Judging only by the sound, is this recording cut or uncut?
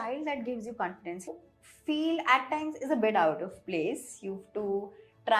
cut